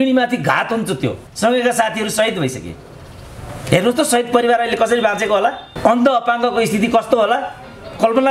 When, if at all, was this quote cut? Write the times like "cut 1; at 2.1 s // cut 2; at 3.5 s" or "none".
cut 1; at 1.2 s